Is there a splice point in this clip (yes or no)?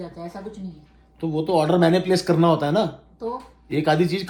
no